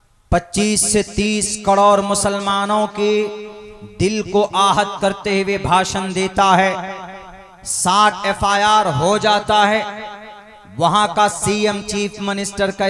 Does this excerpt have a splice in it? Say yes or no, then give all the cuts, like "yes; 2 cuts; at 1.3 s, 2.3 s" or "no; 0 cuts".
no; 0 cuts